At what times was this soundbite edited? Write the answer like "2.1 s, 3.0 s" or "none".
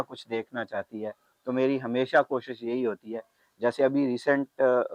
none